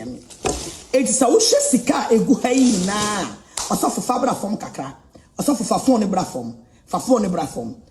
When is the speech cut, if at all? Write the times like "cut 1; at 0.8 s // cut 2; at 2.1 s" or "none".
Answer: none